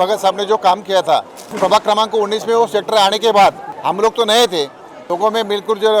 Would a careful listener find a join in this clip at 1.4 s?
yes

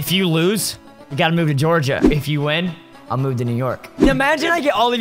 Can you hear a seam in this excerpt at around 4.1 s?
yes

